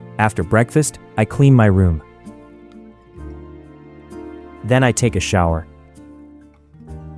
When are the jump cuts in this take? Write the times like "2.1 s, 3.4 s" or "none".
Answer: 2.4 s, 4.6 s, 5.7 s